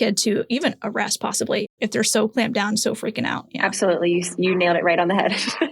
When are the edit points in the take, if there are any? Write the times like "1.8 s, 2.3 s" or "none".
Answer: 1.7 s, 3.5 s